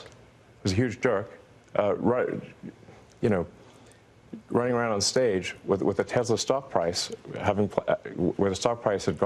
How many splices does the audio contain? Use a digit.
0